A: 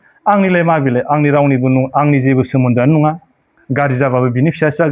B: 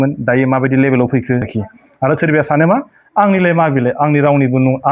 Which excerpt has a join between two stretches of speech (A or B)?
B